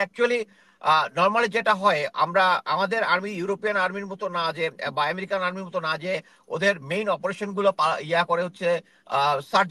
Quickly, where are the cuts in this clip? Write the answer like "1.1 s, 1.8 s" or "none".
none